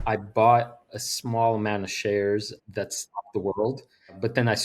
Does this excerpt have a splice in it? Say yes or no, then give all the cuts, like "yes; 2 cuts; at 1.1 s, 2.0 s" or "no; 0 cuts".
yes; 2 cuts; at 1.0 s, 2.5 s